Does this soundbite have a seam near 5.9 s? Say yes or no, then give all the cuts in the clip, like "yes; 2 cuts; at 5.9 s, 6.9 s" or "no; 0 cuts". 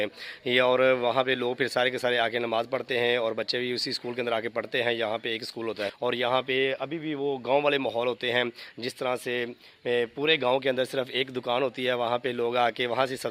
yes; 1 cut; at 5.9 s